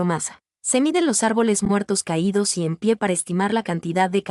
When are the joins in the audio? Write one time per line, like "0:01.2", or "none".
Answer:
none